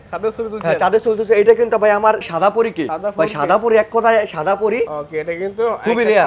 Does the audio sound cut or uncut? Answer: cut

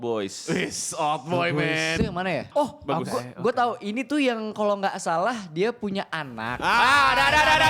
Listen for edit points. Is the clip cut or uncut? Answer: cut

